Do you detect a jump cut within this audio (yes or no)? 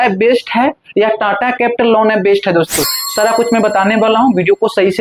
no